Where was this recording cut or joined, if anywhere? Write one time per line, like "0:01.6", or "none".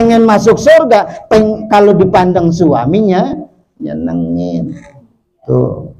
none